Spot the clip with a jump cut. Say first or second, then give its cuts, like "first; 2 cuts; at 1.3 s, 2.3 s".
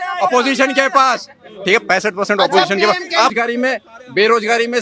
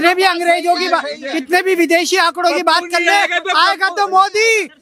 first; 1 cut; at 3.3 s